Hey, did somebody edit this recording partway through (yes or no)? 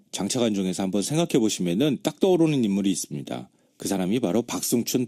yes